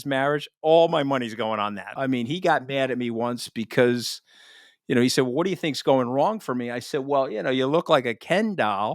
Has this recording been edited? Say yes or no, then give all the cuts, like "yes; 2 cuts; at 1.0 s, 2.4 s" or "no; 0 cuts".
yes; 1 cut; at 1.9 s